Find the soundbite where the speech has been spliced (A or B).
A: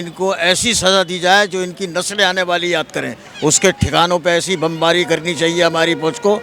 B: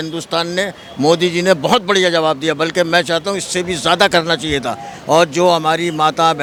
A